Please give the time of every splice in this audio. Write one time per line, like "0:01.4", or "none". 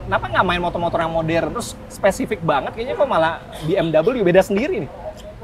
none